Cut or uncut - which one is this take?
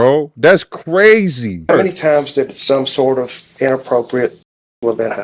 cut